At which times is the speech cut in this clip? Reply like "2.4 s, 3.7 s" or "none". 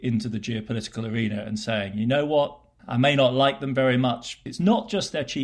4.4 s